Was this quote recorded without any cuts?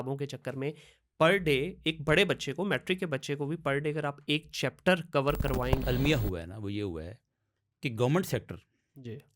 no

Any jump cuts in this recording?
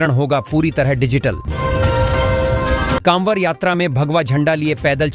yes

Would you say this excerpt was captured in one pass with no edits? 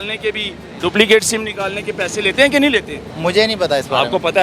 no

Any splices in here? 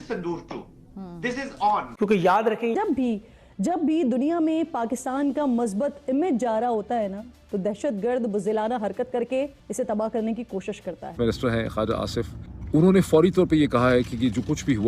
yes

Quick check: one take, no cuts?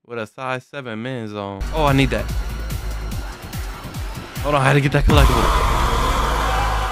no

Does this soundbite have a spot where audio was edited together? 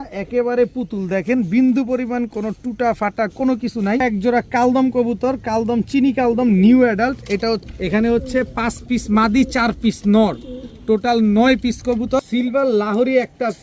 yes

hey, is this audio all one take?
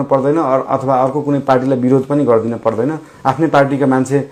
yes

